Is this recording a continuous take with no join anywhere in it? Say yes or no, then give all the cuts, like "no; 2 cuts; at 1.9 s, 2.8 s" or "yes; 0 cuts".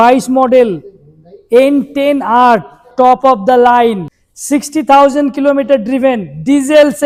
yes; 0 cuts